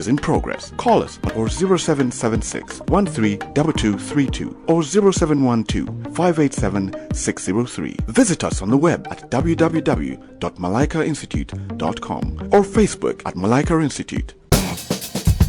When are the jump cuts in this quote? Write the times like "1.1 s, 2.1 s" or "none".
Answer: 14.4 s